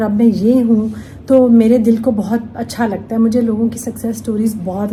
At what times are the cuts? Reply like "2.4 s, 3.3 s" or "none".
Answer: none

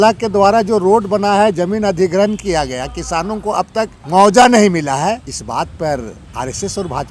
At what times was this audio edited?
4.0 s, 5.3 s, 6.2 s

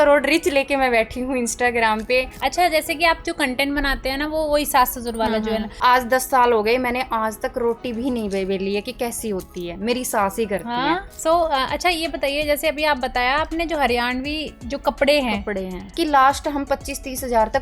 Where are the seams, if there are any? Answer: 2.3 s, 5.7 s, 11.1 s, 15.9 s

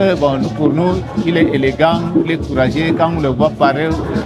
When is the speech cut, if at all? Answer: none

